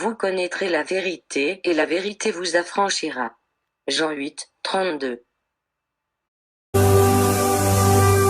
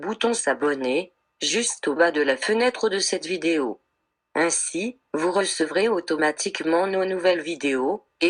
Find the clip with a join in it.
first; 1 cut; at 6.8 s

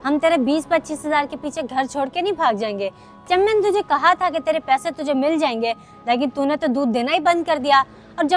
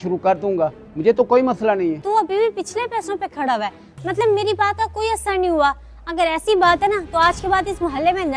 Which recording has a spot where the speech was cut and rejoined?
second; 1 cut; at 2.0 s

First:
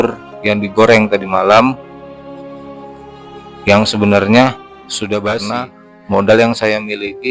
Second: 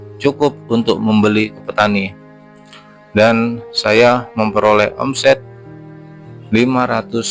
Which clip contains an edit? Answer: first; 1 cut; at 5.4 s

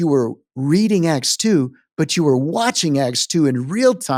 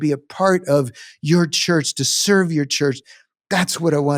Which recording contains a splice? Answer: second; 1 cut; at 3.1 s

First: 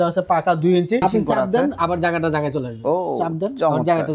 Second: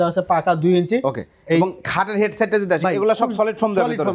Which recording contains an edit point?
first; 1 cut; at 1.0 s

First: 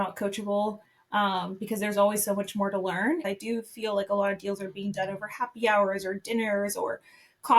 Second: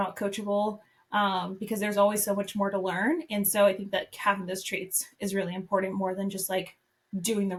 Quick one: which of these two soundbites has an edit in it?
first; 1 cut; at 3.2 s

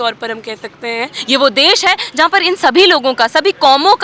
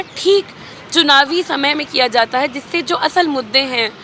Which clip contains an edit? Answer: first; 1 cut; at 1.1 s

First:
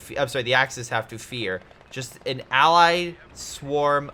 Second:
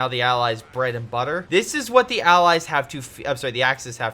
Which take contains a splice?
second; 1 cut; at 1.4 s

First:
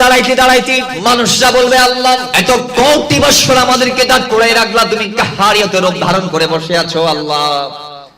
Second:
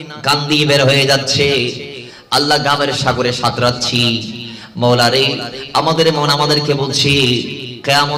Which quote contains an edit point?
first; 2 cuts; at 0.9 s, 2.3 s

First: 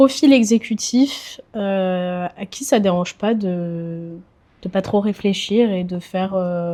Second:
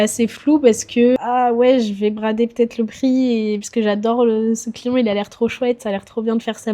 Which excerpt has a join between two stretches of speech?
second; 1 cut; at 1.2 s

